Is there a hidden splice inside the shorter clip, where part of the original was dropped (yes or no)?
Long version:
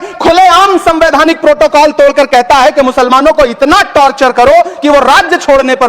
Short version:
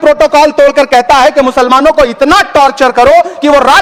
no